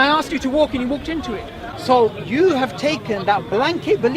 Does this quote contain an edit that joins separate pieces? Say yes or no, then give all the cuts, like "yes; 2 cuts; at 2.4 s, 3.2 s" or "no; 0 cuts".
yes; 1 cut; at 1.7 s